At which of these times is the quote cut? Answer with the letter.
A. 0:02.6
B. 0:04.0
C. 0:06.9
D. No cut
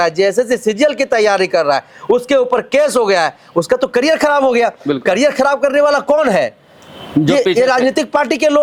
D